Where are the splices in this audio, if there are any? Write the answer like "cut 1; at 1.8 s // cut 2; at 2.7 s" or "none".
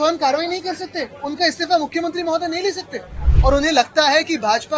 cut 1; at 3.2 s